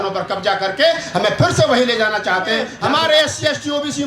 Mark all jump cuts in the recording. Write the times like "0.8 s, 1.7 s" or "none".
2.7 s